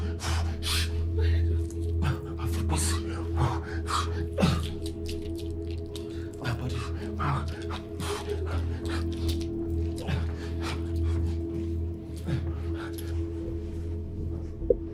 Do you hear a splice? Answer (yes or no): no